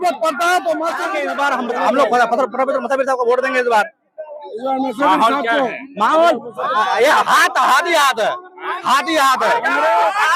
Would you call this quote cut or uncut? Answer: cut